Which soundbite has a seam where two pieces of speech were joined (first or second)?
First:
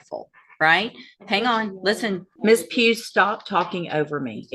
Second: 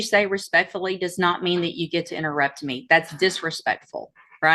first